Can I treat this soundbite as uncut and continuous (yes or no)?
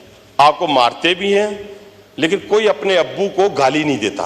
yes